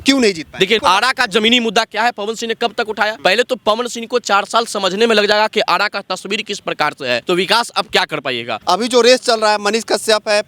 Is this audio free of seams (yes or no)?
no